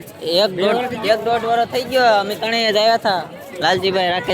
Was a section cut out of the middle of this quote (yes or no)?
no